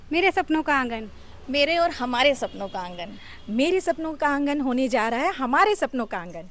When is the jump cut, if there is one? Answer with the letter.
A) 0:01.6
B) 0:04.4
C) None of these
C